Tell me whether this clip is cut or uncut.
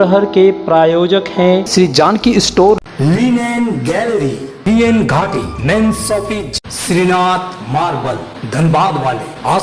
uncut